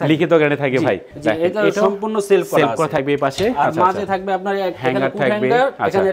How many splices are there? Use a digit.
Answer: 1